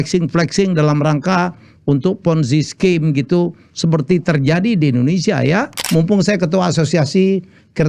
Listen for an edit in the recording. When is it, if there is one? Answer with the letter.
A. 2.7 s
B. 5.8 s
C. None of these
B